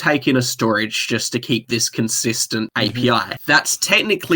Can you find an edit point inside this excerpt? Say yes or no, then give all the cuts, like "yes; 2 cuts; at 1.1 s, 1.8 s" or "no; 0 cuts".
yes; 2 cuts; at 2.7 s, 3.3 s